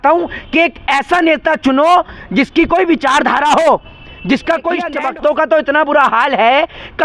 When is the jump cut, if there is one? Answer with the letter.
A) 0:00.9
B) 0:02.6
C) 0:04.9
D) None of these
C